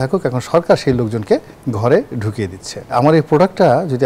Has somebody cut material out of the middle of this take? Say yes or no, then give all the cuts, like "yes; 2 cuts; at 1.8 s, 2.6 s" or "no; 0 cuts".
yes; 1 cut; at 2.9 s